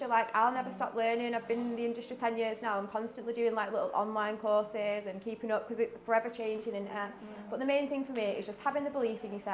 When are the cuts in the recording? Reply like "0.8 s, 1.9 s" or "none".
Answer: none

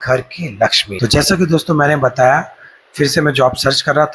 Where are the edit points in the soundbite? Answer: none

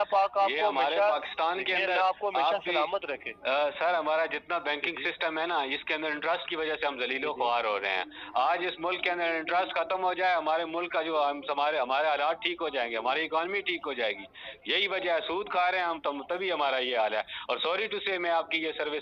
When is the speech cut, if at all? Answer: none

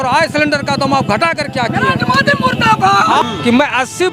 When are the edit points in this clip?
3.2 s

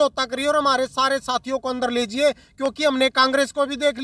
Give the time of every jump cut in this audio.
none

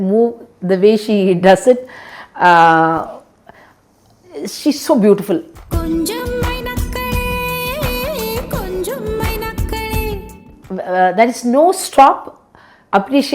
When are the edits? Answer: none

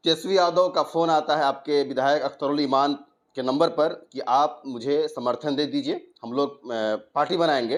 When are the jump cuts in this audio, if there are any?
none

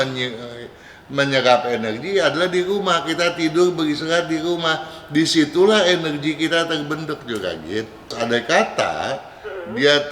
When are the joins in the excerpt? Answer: 8.1 s

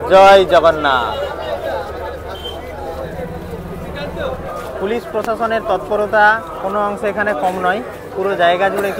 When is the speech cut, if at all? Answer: none

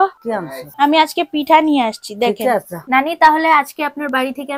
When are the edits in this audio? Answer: 2.7 s

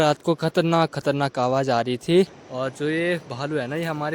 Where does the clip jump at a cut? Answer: 2.3 s

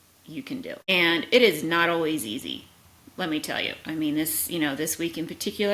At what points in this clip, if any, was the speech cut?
none

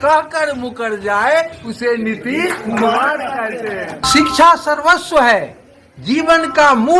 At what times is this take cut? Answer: 4.0 s

